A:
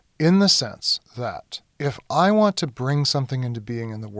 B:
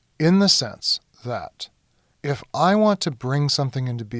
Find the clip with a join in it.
A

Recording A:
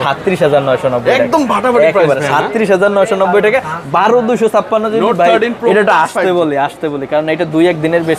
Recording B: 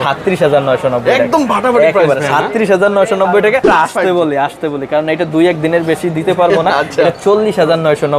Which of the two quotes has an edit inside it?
B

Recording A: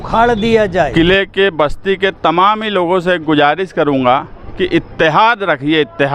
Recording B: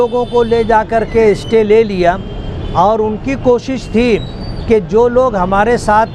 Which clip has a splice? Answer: A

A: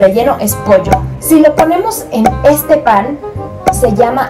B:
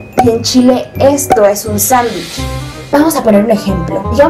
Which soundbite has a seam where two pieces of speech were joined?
B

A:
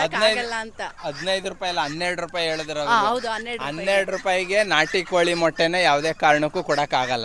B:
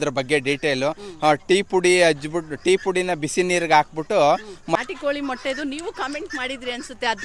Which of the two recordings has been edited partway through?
B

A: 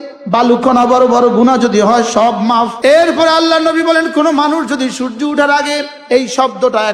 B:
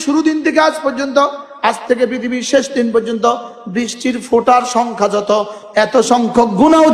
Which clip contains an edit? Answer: A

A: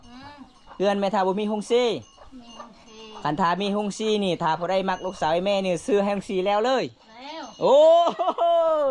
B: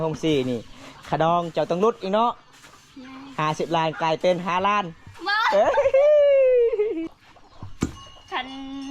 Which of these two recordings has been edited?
B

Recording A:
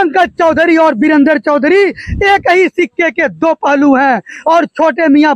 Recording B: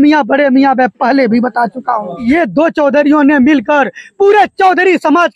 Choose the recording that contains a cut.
B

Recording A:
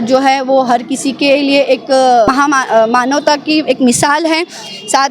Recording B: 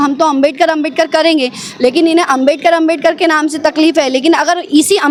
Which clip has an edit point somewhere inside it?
A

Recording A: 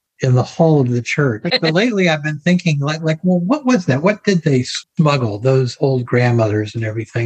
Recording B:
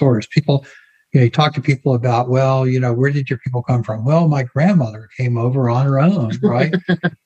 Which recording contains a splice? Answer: A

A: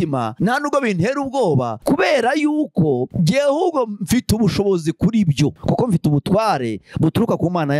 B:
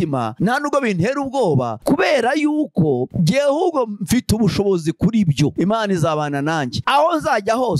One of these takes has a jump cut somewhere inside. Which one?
B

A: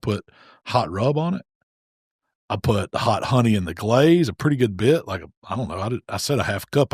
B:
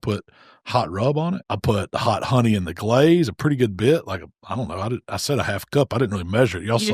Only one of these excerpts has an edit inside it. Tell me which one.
B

